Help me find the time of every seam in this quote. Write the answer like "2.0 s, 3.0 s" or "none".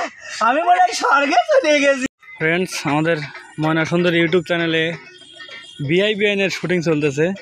2.1 s

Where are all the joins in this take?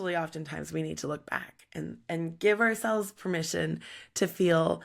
none

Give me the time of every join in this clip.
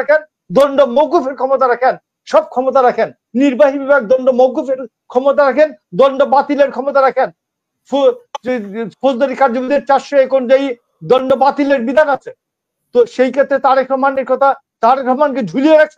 none

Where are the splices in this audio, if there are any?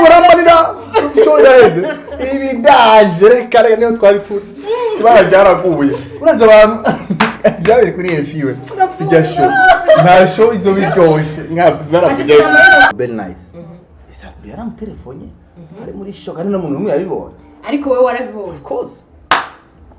12.9 s

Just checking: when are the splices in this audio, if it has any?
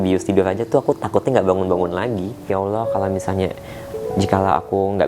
2.5 s

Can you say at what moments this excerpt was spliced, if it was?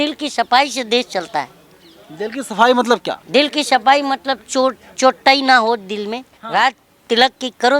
3.1 s, 6.3 s

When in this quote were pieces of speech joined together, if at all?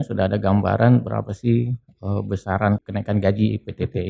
2.8 s

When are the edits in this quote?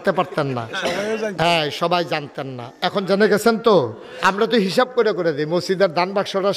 4.0 s

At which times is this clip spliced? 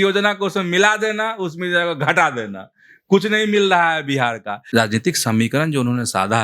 4.6 s

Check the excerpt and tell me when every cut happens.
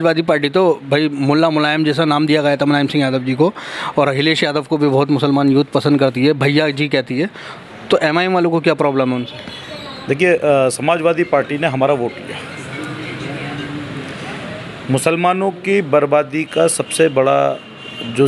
none

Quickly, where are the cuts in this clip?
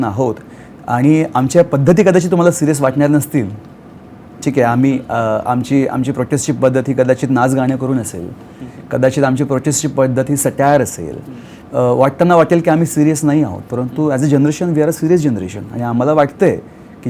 none

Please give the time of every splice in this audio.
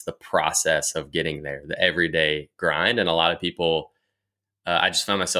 none

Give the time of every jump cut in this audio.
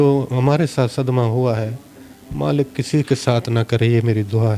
none

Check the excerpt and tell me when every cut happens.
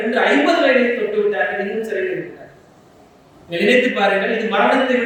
none

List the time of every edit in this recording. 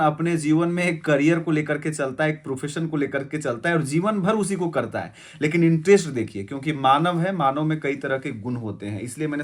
none

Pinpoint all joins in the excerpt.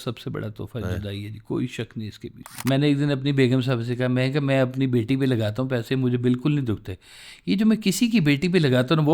2.6 s

